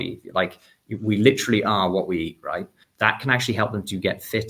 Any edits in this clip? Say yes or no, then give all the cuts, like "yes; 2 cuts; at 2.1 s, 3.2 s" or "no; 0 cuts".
yes; 1 cut; at 2.8 s